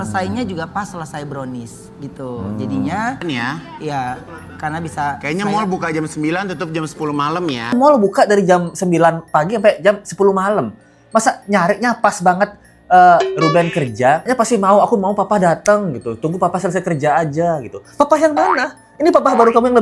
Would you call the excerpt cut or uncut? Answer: cut